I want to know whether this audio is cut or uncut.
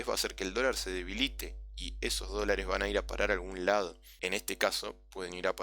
cut